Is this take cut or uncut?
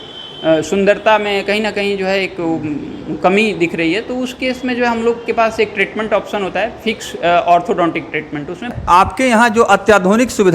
cut